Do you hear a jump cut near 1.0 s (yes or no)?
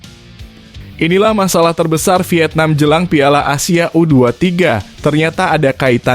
yes